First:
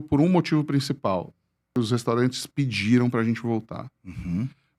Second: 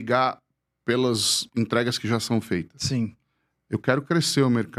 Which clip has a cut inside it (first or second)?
first